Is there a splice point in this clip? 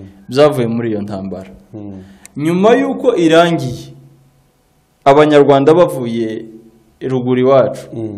no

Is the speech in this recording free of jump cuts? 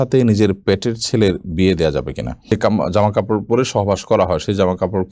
no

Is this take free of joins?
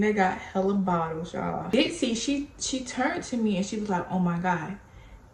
no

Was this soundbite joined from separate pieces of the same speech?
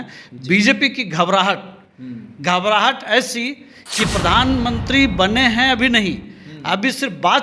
no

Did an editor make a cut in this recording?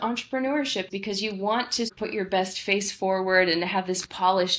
yes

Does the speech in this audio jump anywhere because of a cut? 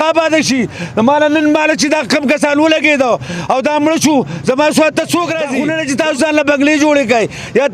yes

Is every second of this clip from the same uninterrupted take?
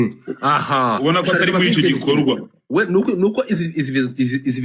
yes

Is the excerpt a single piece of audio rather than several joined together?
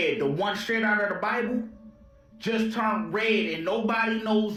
yes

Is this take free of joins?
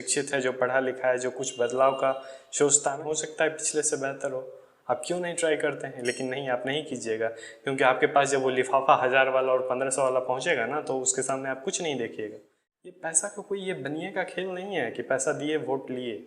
no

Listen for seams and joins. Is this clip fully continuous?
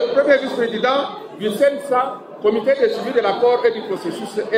yes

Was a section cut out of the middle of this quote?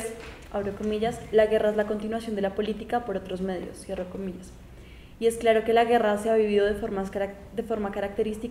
no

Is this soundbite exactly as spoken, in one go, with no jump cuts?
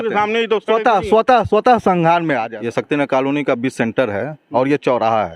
no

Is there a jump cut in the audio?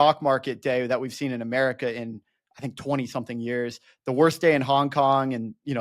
no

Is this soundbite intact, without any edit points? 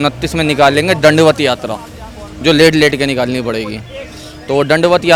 yes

